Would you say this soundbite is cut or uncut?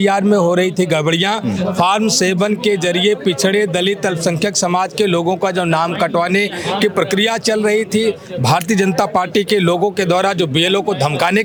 uncut